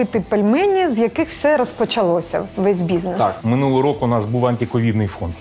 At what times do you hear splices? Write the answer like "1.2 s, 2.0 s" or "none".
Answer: 3.4 s